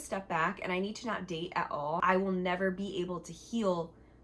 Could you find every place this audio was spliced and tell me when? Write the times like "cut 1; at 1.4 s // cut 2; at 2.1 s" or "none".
cut 1; at 2.0 s

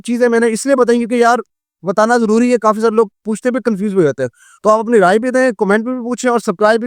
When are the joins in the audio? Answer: none

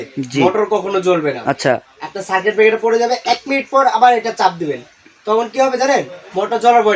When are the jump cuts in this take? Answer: none

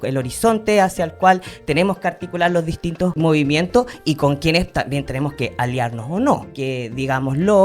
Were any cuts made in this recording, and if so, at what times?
cut 1; at 3.2 s // cut 2; at 6.5 s

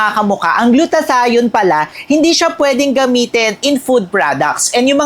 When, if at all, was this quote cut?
none

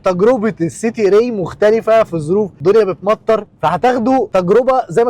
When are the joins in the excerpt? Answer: cut 1; at 2.5 s // cut 2; at 4.3 s

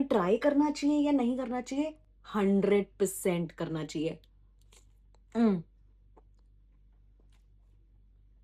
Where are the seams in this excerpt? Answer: none

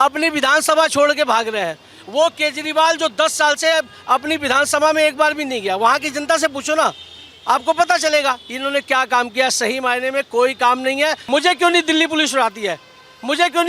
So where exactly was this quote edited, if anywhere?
cut 1; at 11.2 s

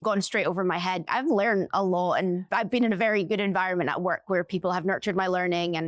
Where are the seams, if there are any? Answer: cut 1; at 1.0 s

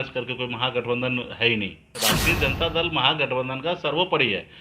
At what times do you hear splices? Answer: cut 1; at 1.9 s

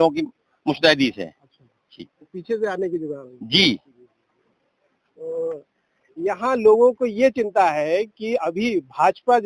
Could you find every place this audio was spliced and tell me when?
none

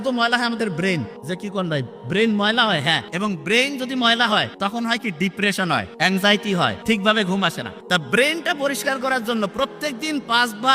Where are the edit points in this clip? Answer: cut 1; at 1.1 s // cut 2; at 3.1 s // cut 3; at 4.5 s // cut 4; at 5.9 s // cut 5; at 6.8 s // cut 6; at 7.7 s

